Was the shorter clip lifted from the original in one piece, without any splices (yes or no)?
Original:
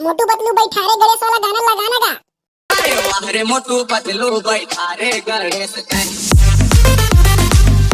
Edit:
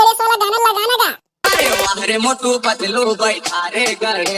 no